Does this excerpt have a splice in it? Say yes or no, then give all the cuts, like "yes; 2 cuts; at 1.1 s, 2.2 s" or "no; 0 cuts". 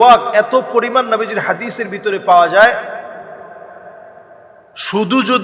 no; 0 cuts